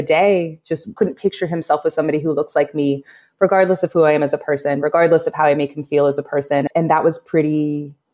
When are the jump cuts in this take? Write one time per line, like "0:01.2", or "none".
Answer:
0:00.9
0:06.7